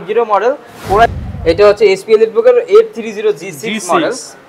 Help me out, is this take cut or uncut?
cut